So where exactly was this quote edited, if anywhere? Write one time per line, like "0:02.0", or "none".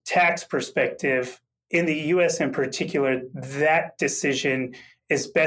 none